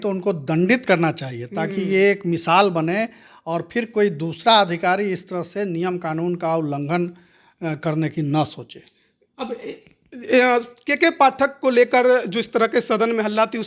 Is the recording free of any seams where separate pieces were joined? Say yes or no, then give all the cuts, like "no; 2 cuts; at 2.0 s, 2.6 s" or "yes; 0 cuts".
yes; 0 cuts